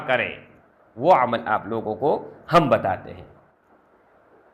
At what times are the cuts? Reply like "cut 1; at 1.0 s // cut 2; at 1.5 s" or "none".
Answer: cut 1; at 3.5 s